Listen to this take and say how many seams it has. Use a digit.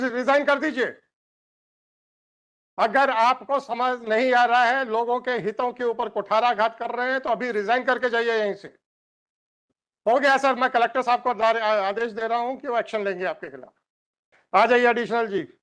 1